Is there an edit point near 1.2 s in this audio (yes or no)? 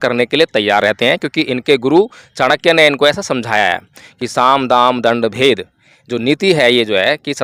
no